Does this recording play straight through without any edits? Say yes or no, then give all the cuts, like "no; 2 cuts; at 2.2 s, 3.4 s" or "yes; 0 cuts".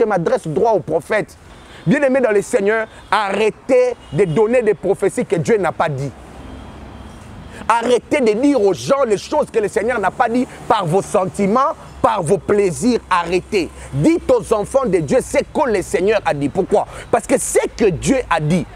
no; 1 cut; at 1.4 s